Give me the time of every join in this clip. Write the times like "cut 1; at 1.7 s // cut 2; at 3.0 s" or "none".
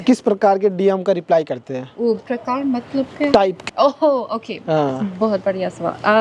none